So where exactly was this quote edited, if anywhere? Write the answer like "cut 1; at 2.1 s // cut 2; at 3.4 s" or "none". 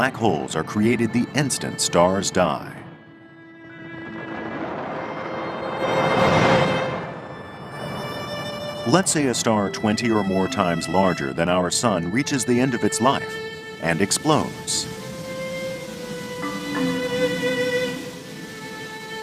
cut 1; at 3.3 s

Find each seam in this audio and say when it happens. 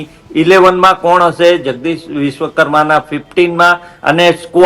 none

